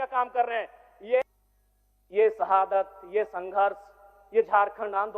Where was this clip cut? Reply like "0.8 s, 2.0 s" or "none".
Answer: 1.2 s